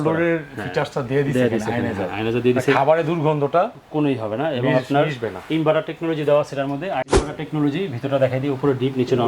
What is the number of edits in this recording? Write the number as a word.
one